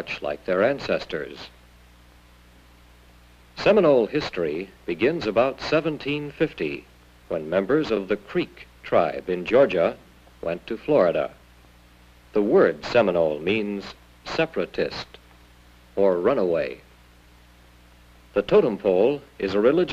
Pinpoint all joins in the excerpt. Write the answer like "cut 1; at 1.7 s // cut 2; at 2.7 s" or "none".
cut 1; at 10.2 s